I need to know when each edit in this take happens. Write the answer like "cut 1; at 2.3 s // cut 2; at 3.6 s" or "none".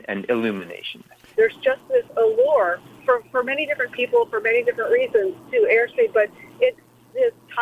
cut 1; at 1.3 s // cut 2; at 2.9 s